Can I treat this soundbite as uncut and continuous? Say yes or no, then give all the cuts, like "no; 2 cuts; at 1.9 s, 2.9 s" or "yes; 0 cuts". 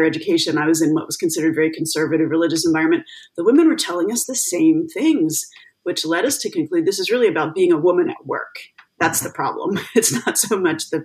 yes; 0 cuts